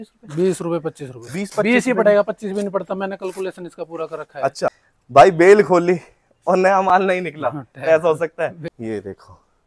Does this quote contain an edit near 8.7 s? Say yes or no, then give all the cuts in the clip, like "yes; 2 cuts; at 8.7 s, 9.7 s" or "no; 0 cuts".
yes; 2 cuts; at 4.9 s, 8.7 s